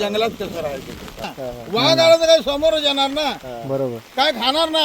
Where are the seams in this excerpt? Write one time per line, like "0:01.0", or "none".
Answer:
0:01.3